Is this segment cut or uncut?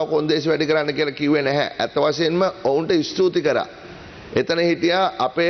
uncut